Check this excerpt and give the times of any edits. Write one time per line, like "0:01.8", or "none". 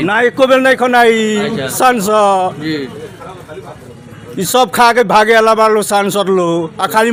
none